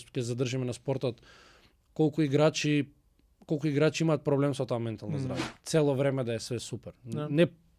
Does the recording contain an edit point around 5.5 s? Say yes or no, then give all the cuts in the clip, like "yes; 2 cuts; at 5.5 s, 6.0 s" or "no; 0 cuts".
yes; 1 cut; at 5.5 s